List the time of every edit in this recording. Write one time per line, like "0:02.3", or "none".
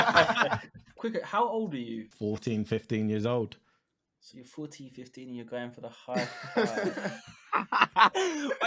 0:00.9
0:02.0